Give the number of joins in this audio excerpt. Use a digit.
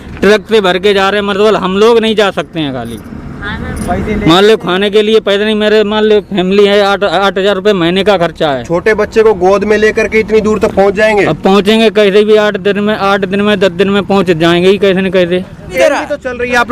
1